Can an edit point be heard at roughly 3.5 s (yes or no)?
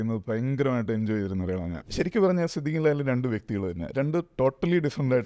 no